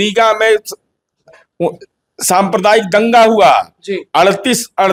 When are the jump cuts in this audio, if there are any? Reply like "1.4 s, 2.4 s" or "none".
none